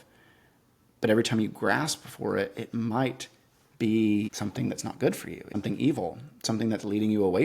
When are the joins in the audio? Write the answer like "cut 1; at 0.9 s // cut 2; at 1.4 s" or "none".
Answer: cut 1; at 4.3 s // cut 2; at 5.5 s

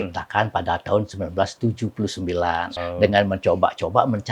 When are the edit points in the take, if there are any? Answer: cut 1; at 2.7 s

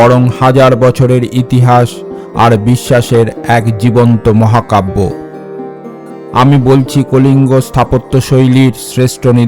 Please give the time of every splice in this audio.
cut 1; at 5.7 s

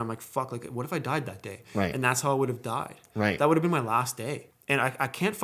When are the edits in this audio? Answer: cut 1; at 4.5 s

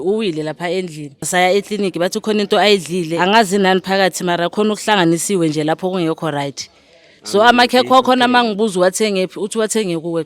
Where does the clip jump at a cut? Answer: cut 1; at 1.3 s // cut 2; at 3.1 s

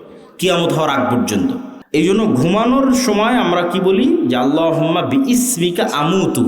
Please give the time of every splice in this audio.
cut 1; at 1.7 s

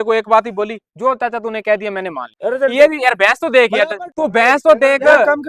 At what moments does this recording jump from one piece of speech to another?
cut 1; at 2.3 s // cut 2; at 4.0 s

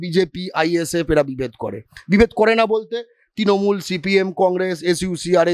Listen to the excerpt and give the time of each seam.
none

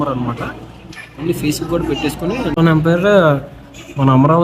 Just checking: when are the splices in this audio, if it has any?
cut 1; at 2.6 s

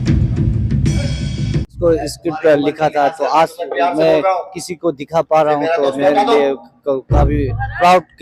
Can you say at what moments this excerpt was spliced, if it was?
cut 1; at 1.7 s

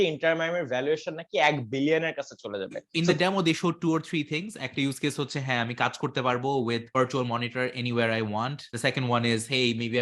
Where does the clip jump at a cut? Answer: cut 1; at 2.8 s // cut 2; at 6.9 s // cut 3; at 8.6 s

